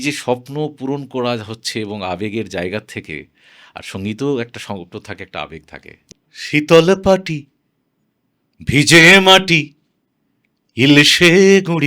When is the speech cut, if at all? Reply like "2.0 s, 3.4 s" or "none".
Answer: 5.9 s